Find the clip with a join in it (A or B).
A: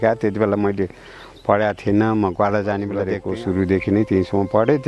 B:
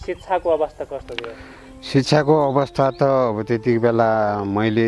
A